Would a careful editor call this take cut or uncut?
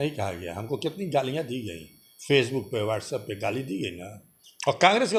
uncut